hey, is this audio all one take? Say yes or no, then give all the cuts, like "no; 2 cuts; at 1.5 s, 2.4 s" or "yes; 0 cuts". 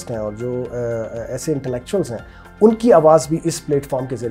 yes; 0 cuts